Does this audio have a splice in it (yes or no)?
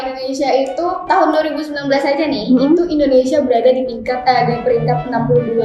no